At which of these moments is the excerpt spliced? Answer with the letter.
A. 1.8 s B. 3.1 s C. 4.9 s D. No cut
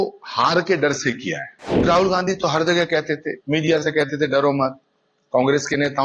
A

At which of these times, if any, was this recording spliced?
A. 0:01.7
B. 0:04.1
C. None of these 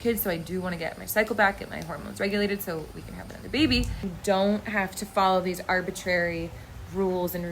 B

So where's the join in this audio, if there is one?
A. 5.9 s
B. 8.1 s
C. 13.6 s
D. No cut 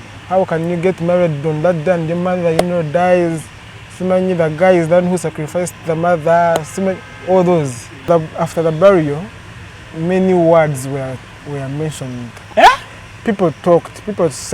B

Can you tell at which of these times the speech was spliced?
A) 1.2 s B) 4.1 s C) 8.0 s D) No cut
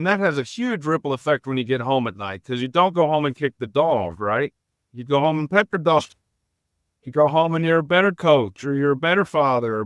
D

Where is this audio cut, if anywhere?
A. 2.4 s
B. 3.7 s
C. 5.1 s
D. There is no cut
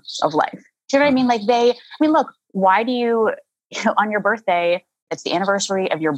C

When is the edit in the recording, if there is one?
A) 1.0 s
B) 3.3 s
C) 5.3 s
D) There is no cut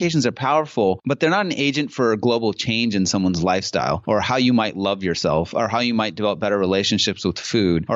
A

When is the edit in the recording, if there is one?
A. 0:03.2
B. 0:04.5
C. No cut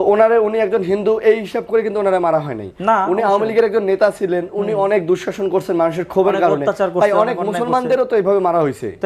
C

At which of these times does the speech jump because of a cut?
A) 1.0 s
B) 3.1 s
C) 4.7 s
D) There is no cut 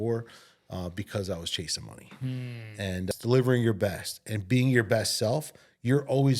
B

